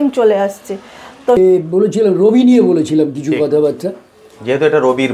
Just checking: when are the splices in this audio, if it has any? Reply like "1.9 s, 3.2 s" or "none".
1.4 s